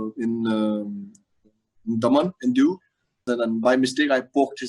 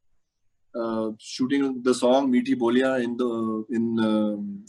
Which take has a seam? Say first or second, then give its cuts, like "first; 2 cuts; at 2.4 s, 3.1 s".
first; 1 cut; at 3.3 s